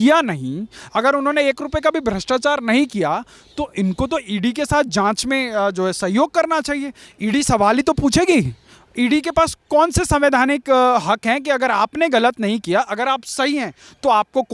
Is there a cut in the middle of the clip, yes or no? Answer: no